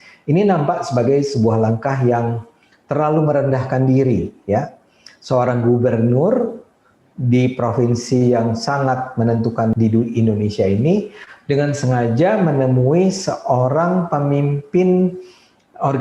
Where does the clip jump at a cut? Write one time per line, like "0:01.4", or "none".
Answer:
0:09.7